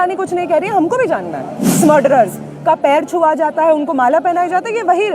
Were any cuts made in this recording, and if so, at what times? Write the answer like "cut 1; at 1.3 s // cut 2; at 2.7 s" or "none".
cut 1; at 1.6 s